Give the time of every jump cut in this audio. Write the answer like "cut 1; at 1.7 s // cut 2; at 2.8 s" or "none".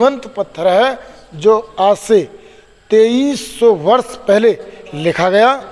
none